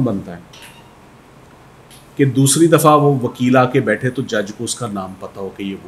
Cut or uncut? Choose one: uncut